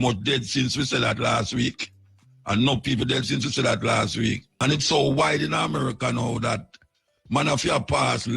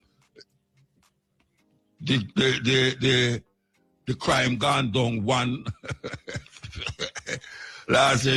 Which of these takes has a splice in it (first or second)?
first